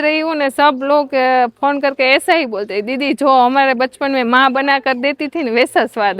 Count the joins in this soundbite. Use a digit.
0